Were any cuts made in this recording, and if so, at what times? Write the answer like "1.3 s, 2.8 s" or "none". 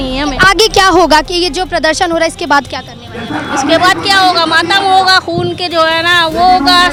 none